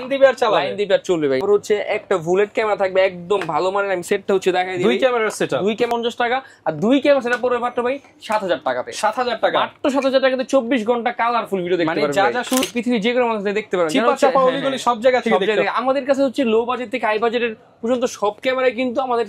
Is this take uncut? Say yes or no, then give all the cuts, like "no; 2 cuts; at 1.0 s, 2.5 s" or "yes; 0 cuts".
no; 3 cuts; at 1.4 s, 5.9 s, 12.6 s